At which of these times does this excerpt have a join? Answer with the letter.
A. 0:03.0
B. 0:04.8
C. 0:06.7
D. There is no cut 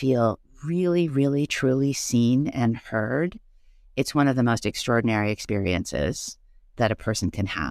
C